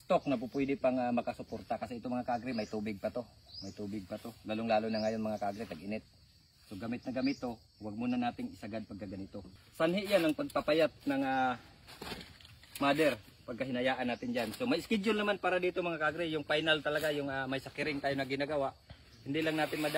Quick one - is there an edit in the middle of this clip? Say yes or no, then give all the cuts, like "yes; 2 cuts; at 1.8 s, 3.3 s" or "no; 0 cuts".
yes; 1 cut; at 9.4 s